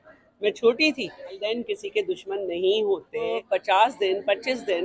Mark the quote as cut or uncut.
cut